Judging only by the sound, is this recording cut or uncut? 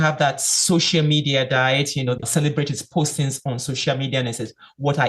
cut